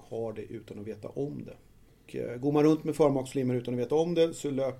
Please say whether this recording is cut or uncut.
cut